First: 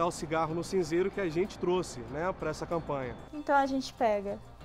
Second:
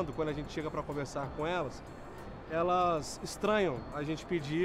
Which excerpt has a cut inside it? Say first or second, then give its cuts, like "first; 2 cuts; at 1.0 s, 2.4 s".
first; 1 cut; at 3.2 s